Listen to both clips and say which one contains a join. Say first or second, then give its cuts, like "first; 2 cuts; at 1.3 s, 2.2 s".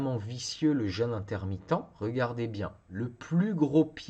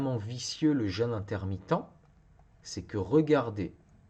first; 2 cuts; at 1.9 s, 2.8 s